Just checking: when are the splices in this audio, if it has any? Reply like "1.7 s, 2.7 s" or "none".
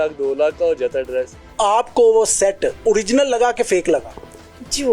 1.4 s, 2.8 s